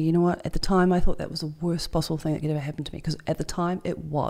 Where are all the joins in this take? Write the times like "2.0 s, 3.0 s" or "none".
none